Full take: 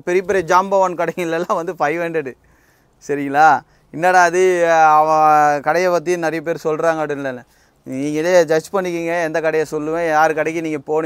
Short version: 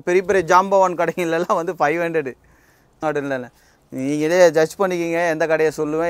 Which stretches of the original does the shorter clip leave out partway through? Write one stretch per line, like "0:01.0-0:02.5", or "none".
0:03.0-0:07.0